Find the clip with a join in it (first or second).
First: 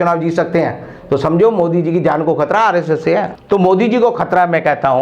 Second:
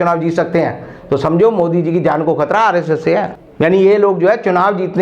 first